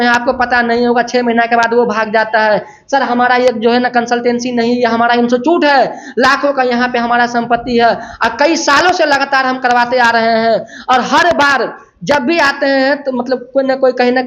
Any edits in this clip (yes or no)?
no